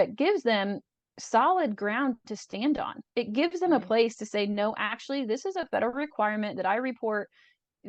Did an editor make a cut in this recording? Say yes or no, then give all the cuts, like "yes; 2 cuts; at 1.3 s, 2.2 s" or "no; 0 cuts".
no; 0 cuts